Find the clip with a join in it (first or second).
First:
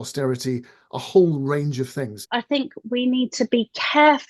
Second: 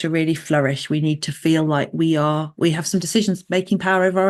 first